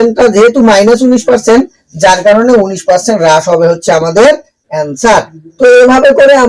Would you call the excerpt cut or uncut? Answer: uncut